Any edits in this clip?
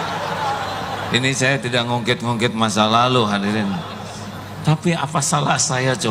no; 0 cuts

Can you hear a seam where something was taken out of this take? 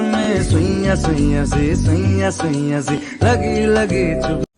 no; 0 cuts

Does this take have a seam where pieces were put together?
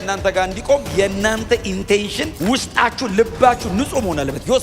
yes; 1 cut; at 2.3 s

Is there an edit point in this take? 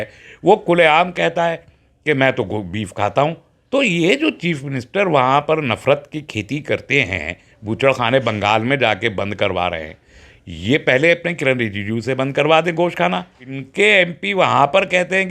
yes; 2 cuts; at 3.5 s, 13.6 s

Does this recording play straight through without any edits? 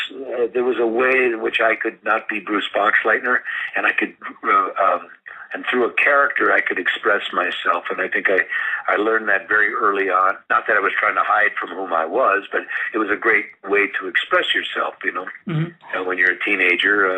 no; 1 cut; at 2.7 s

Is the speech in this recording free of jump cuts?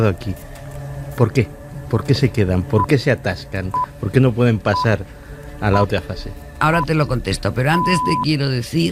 yes; 0 cuts

